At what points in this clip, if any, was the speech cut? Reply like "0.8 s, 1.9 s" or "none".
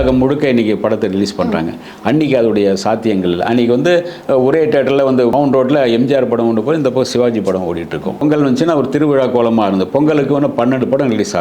5.3 s, 8.2 s